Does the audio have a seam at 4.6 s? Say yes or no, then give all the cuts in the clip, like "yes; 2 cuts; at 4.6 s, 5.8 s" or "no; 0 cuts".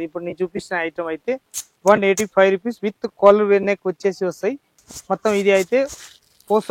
no; 0 cuts